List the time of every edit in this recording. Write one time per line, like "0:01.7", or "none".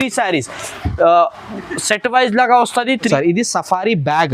0:03.1